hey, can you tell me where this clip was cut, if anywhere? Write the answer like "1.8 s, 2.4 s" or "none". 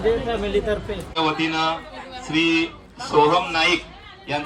1.1 s

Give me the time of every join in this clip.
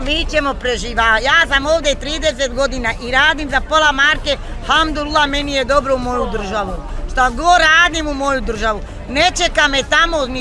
none

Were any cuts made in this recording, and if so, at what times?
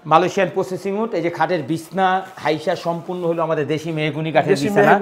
none

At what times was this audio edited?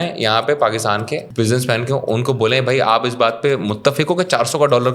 1.3 s

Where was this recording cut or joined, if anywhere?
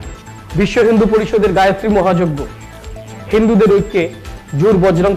none

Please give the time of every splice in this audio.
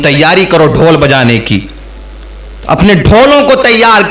none

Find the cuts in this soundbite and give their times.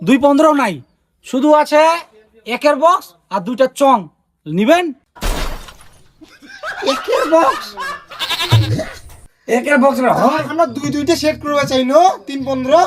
none

